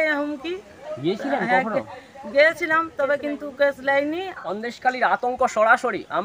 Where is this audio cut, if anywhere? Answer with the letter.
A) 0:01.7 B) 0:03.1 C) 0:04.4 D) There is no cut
C